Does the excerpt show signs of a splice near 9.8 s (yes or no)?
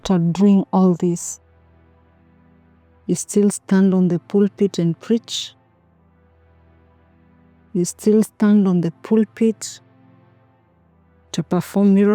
no